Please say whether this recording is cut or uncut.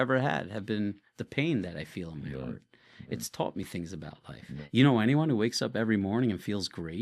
cut